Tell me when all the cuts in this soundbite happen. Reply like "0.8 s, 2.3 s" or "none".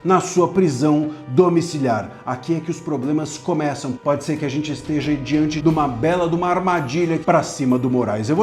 3.9 s, 5.6 s, 7.2 s